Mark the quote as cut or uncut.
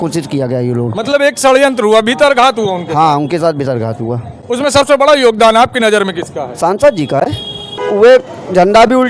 cut